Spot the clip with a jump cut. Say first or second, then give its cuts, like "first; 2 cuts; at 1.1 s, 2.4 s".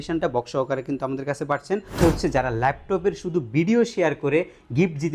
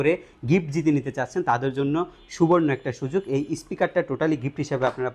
first; 1 cut; at 2.0 s